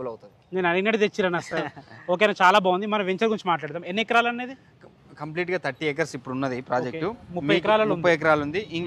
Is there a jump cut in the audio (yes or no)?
no